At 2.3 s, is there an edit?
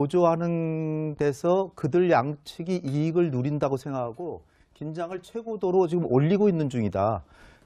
yes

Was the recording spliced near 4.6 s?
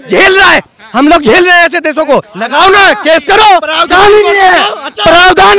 no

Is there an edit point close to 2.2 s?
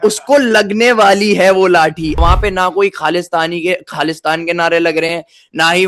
yes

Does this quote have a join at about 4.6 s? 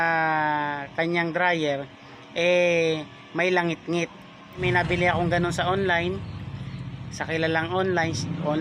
yes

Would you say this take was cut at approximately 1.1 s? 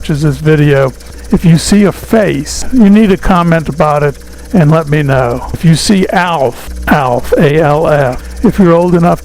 yes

